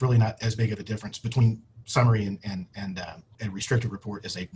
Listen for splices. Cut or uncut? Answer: cut